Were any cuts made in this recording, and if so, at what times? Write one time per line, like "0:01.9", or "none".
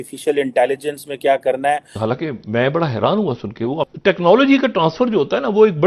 0:02.0
0:03.8